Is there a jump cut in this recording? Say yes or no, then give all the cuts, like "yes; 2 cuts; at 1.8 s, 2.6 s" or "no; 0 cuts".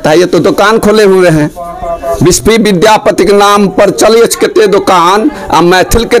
no; 0 cuts